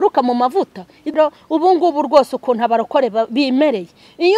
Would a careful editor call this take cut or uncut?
cut